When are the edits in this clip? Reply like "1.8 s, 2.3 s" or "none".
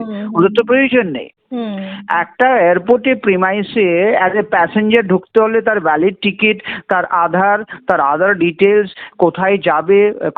none